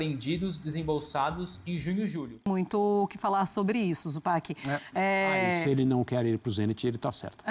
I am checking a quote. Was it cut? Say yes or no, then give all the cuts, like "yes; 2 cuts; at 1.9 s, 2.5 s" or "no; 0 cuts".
yes; 1 cut; at 2.5 s